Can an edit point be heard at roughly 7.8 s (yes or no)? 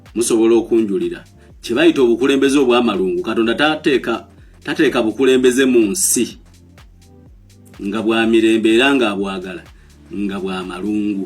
yes